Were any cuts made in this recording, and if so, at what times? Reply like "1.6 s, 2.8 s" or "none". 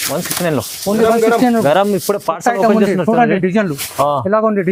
none